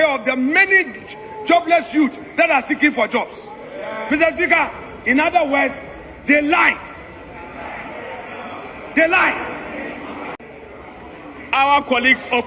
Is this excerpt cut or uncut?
cut